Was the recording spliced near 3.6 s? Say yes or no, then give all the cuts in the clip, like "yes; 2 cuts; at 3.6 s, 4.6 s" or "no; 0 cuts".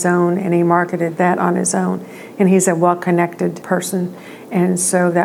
yes; 2 cuts; at 1.1 s, 3.6 s